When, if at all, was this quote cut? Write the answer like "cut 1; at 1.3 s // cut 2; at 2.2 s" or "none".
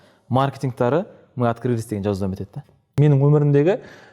cut 1; at 2.9 s